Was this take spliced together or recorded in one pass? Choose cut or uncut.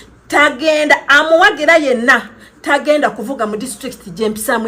cut